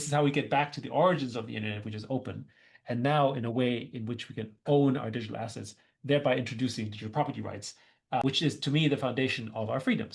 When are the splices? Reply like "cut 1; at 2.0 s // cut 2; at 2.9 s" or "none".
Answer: cut 1; at 8.2 s